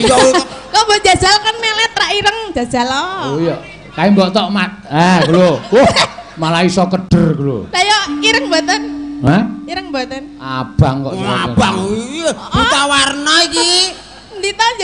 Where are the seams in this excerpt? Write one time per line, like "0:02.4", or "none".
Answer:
none

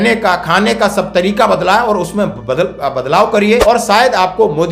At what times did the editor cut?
0:03.6

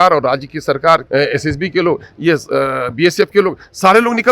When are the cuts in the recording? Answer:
0:01.0

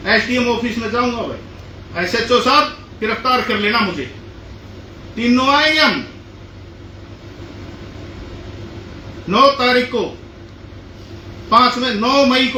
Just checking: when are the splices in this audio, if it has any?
none

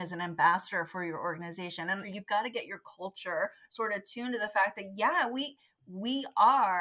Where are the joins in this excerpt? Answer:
0:02.1

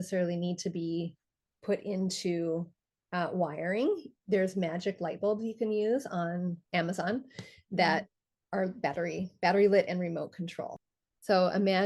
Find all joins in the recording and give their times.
0:10.8

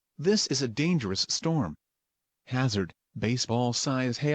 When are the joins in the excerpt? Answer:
0:01.0

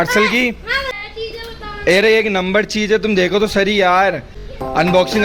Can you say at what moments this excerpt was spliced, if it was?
0:00.9

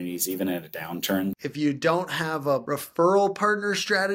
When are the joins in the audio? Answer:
0:01.4
0:02.6

